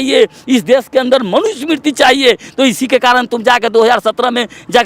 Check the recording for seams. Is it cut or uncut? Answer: uncut